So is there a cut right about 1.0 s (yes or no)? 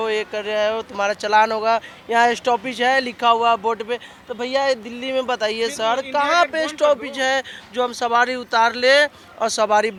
no